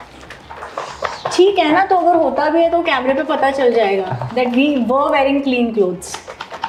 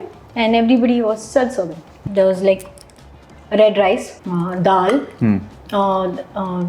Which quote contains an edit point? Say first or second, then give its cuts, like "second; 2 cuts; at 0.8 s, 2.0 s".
second; 2 cuts; at 1.9 s, 4.2 s